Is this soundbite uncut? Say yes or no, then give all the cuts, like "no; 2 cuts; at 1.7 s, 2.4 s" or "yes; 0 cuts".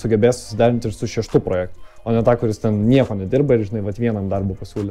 yes; 0 cuts